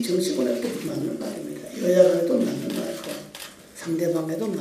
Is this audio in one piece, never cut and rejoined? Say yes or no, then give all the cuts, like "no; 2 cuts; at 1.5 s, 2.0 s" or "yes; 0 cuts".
yes; 0 cuts